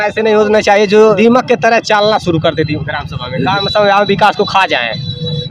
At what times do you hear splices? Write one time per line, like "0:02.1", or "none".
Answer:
0:01.2